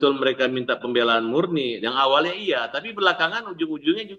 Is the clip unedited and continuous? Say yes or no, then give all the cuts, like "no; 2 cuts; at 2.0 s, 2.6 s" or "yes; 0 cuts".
yes; 0 cuts